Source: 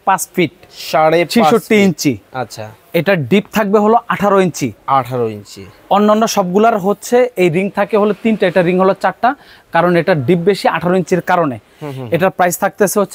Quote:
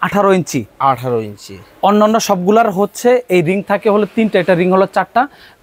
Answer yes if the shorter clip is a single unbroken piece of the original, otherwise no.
yes